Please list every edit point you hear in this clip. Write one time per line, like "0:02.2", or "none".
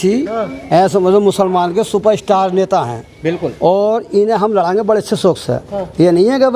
none